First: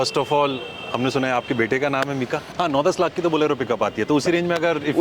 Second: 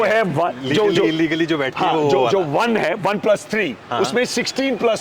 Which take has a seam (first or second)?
first